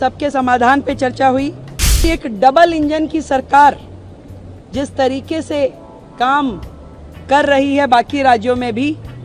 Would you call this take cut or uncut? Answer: cut